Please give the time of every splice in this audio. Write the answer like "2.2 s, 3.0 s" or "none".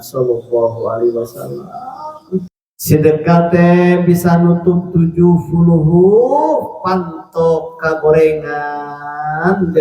2.6 s